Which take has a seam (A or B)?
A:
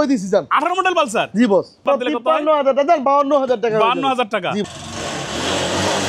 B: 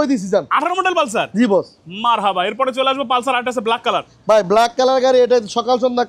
A